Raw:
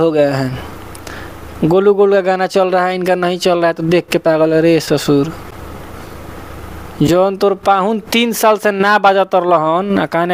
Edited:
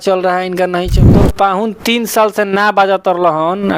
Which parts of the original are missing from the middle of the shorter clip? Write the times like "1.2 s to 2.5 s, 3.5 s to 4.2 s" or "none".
3.5 s to 7.3 s